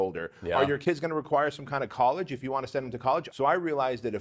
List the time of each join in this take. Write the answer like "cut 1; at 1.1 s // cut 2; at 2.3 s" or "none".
cut 1; at 3.3 s